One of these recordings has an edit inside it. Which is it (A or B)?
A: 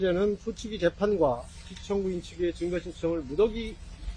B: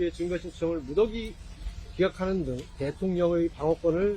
B